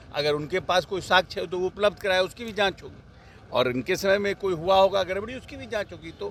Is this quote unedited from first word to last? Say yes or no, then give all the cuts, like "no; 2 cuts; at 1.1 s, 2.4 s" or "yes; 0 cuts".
yes; 0 cuts